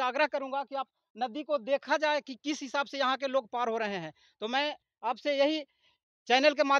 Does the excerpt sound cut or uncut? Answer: uncut